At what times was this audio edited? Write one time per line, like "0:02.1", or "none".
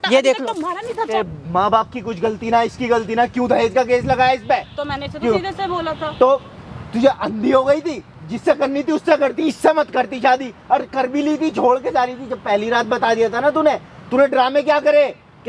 0:01.2